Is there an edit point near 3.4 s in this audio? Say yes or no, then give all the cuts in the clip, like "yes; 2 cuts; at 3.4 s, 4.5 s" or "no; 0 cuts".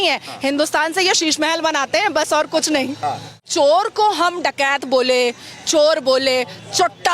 yes; 1 cut; at 3.4 s